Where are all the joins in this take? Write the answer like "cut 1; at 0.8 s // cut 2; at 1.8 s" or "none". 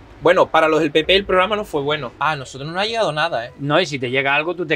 cut 1; at 2.1 s